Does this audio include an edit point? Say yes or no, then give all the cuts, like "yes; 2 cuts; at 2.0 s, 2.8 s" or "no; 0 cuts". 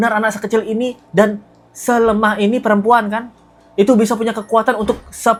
no; 0 cuts